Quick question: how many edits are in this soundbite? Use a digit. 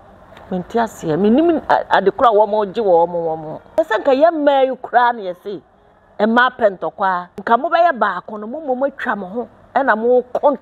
2